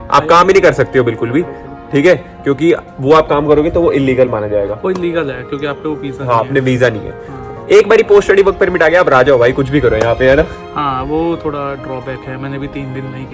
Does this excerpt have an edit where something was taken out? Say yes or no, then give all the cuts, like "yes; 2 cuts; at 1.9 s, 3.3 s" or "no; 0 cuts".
no; 0 cuts